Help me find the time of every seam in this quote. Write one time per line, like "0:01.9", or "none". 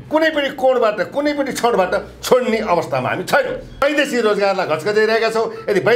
0:03.8